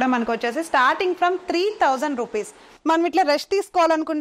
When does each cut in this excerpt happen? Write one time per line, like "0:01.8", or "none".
0:02.6